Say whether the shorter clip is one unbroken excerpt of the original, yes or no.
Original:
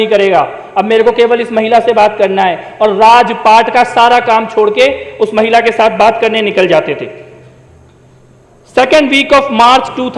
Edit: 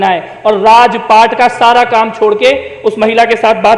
yes